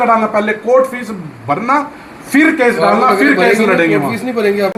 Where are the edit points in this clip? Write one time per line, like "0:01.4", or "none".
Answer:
none